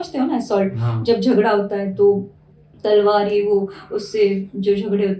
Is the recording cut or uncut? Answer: uncut